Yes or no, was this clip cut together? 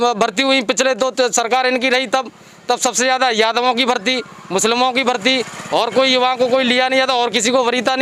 no